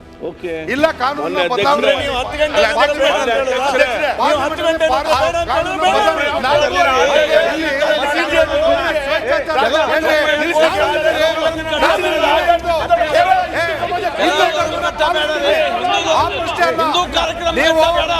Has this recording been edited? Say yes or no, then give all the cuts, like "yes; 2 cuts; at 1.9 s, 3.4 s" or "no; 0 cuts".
no; 0 cuts